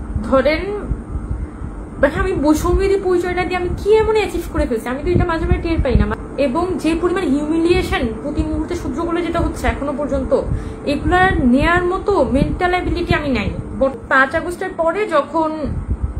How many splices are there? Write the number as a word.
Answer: two